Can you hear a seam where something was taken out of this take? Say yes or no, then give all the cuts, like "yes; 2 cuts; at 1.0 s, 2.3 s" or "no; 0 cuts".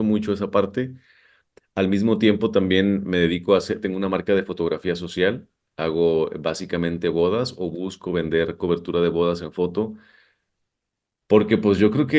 no; 0 cuts